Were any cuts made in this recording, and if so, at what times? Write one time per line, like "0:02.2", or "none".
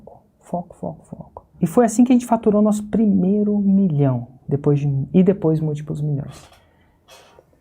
0:01.5

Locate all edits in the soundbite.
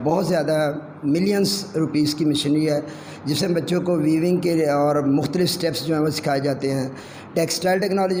none

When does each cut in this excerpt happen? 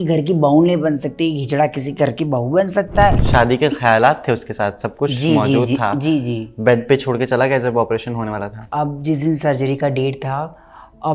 0:03.2
0:08.7

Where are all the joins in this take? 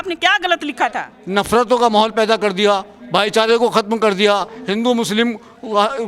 0:01.1

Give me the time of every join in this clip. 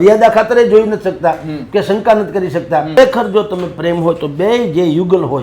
0:03.0

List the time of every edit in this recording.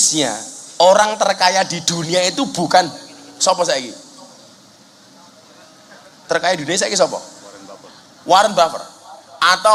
none

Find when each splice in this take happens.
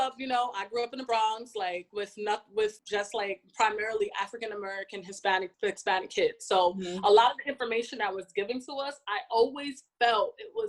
0:01.9
0:02.8
0:05.5

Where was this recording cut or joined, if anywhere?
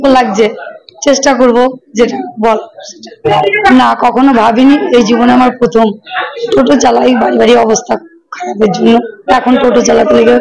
0:03.3
0:06.4

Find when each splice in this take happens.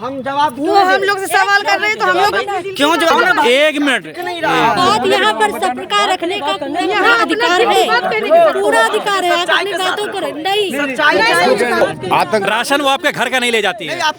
0:03.1
0:11.8

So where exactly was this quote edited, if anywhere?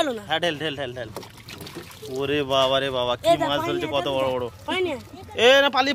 none

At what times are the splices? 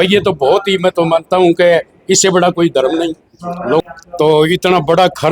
0:03.8

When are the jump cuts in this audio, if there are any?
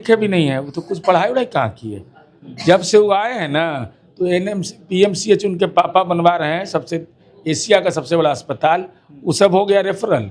none

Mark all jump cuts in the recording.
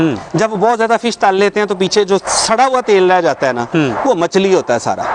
none

